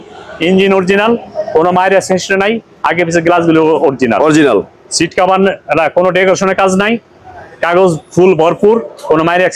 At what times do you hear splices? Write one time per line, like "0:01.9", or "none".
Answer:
none

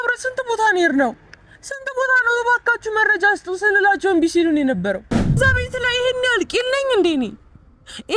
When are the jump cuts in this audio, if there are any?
0:05.4

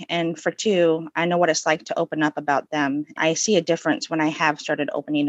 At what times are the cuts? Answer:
0:03.2

